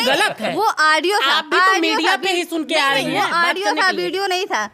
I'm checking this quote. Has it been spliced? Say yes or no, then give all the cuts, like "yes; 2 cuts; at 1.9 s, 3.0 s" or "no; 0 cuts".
no; 0 cuts